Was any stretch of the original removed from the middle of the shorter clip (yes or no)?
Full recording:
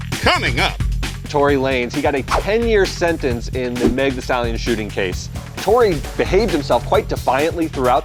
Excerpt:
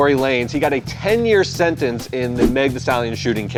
no